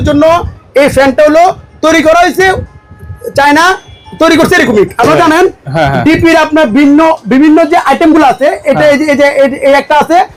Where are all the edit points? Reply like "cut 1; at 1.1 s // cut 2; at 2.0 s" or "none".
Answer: none